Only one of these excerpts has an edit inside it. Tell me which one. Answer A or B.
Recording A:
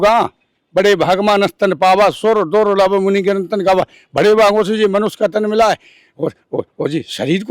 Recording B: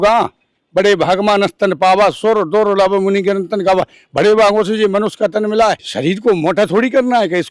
B